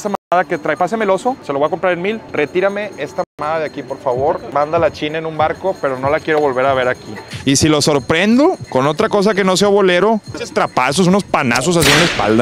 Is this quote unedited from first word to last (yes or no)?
yes